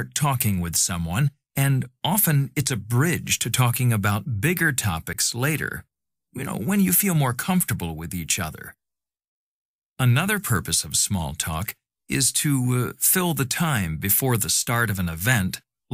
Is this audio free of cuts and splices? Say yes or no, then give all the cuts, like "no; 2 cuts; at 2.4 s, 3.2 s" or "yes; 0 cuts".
no; 1 cut; at 13.5 s